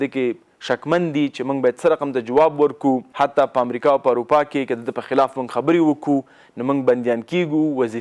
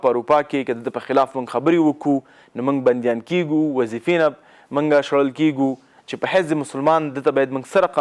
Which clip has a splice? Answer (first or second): first